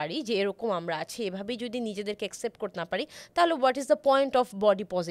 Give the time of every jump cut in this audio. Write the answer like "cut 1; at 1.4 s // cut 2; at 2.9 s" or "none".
none

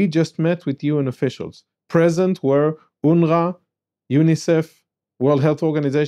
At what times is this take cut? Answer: none

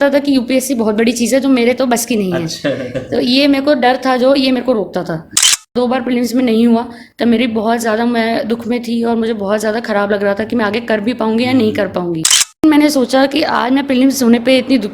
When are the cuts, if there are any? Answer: cut 1; at 5.7 s // cut 2; at 12.6 s

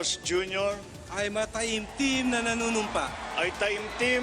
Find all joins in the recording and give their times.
none

